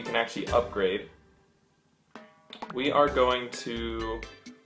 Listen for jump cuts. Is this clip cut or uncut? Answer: uncut